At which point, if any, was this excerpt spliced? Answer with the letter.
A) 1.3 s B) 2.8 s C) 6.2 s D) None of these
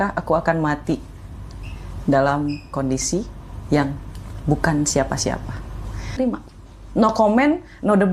C